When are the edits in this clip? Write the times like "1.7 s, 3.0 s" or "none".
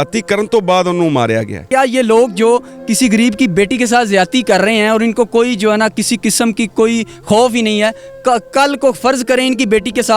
1.6 s